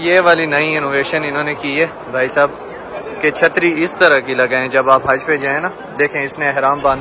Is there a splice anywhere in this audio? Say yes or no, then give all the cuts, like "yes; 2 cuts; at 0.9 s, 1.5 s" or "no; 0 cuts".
no; 0 cuts